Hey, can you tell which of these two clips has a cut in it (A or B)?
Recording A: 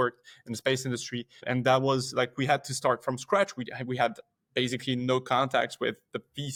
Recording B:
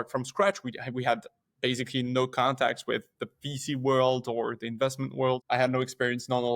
B